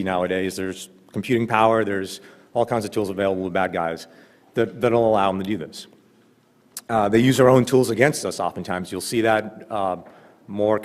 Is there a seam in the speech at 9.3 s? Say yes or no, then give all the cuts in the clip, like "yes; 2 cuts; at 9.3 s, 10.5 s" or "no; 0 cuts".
yes; 1 cut; at 9.3 s